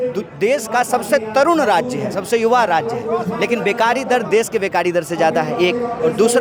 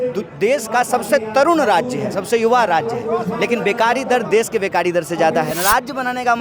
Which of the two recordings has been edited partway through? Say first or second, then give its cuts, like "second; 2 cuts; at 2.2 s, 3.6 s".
second; 1 cut; at 5.5 s